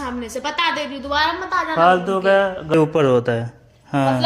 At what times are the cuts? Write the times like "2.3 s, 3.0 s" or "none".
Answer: 2.7 s